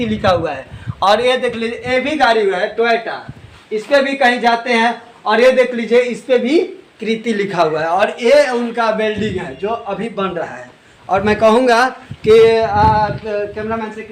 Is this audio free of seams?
yes; 0 cuts

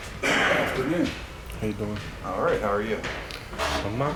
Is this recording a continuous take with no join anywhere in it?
yes; 0 cuts

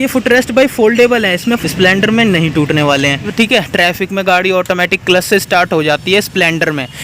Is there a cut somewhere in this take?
yes; 2 cuts; at 1.6 s, 3.3 s

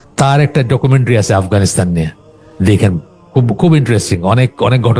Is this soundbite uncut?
yes; 0 cuts

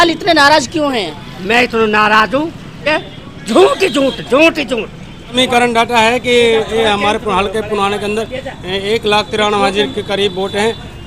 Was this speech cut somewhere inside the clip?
yes; 2 cuts; at 2.8 s, 5.4 s

